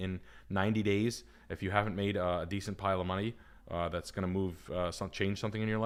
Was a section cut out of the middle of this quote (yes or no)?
no